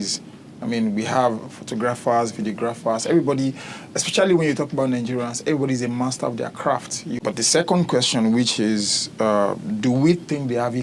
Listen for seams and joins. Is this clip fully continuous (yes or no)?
no